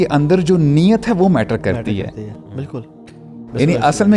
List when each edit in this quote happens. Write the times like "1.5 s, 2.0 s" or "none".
none